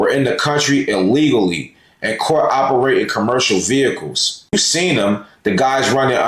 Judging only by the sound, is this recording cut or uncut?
cut